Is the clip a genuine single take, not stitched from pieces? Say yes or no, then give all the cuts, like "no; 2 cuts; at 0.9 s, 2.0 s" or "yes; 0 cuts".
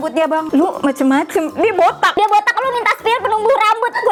yes; 0 cuts